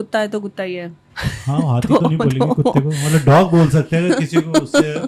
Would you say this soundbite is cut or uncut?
uncut